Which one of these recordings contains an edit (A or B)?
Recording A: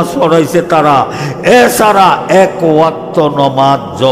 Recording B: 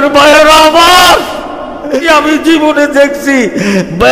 B